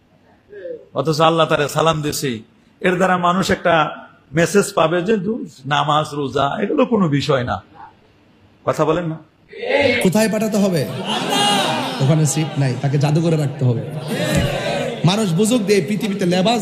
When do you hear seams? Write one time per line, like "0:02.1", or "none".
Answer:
0:10.0

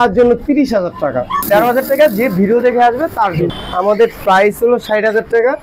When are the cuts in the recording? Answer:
0:01.3
0:03.5

